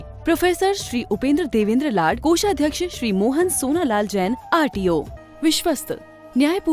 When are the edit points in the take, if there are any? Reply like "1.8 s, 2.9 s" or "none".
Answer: 5.2 s

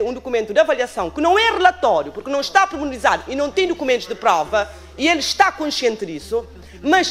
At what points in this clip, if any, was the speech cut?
none

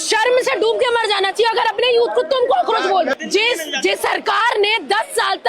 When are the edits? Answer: 3.1 s

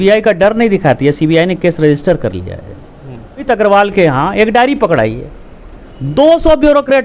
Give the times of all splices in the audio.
3.4 s

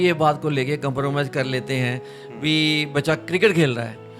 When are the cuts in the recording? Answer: none

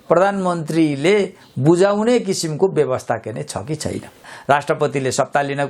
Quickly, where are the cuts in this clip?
4.3 s

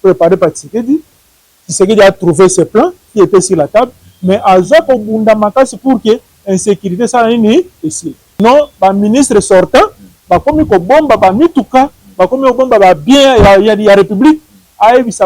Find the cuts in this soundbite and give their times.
8.4 s

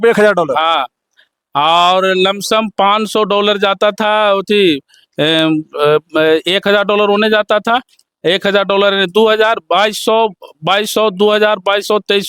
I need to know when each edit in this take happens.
none

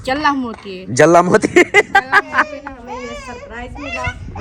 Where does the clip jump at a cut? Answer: 2.7 s

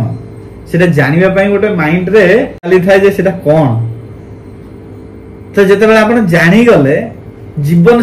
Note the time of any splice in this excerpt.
2.7 s

